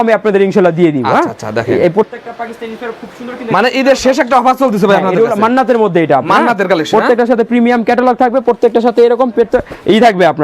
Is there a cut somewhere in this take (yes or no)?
no